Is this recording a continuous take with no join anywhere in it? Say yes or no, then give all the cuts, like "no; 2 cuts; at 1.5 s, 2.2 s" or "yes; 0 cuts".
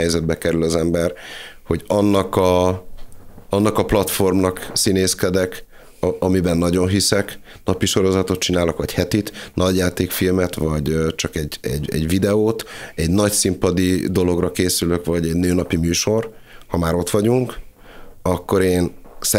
yes; 0 cuts